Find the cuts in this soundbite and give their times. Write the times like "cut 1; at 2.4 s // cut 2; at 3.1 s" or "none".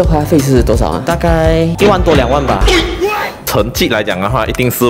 cut 1; at 1.0 s // cut 2; at 3.3 s